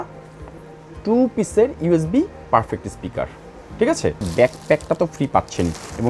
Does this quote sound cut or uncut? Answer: cut